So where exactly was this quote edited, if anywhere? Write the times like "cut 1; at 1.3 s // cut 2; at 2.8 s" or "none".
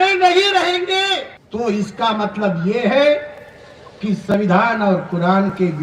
cut 1; at 1.4 s